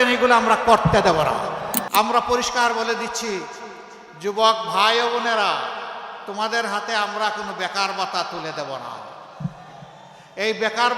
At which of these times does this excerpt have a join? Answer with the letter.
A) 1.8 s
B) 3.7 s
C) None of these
A